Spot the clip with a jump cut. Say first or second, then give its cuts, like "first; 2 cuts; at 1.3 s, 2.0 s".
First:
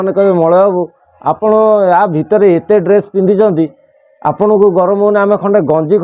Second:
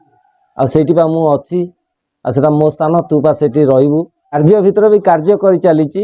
second; 1 cut; at 4.4 s